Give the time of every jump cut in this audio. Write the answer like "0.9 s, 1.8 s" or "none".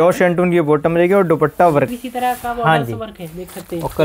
1.9 s